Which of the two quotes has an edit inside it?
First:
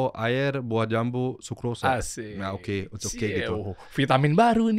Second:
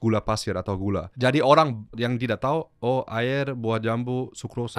second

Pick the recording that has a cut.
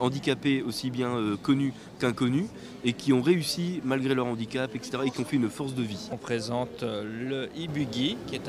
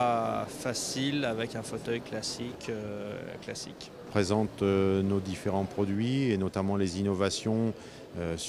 first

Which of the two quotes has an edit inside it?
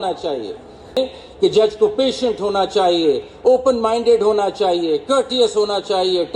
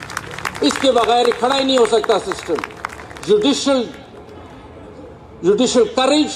first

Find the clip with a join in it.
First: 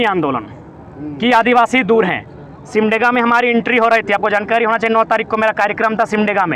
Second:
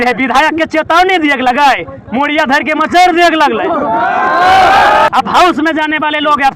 second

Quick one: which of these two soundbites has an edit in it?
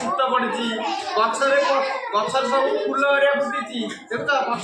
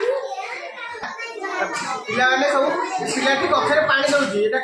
second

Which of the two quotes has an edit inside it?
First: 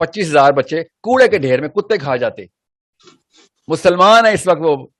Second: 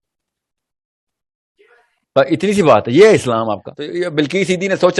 second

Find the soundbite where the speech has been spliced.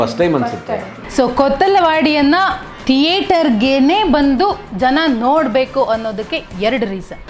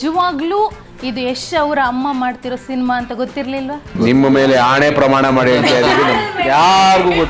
first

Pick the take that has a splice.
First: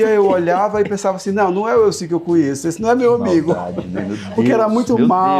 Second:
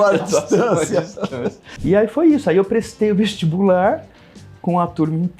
second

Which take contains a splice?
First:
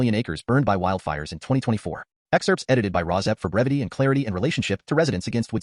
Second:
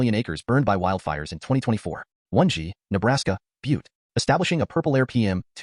second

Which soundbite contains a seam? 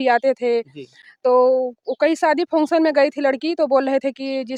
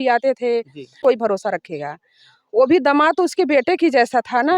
second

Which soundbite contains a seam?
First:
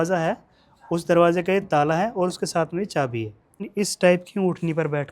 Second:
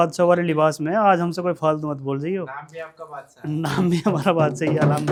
first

